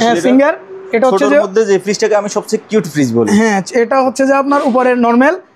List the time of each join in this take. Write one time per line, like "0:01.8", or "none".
none